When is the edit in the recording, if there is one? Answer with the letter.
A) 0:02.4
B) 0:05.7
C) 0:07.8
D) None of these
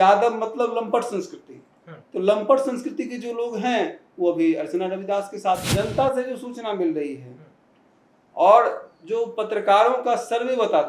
B